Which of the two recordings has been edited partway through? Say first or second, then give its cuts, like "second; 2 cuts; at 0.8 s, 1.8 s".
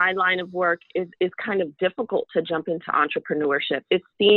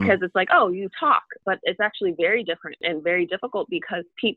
second; 2 cuts; at 1.4 s, 2.8 s